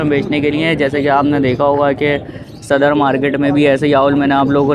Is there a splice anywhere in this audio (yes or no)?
no